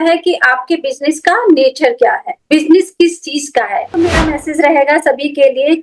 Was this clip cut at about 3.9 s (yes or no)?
yes